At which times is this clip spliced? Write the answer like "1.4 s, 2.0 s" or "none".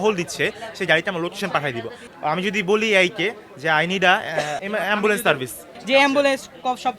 2.0 s, 4.6 s, 5.7 s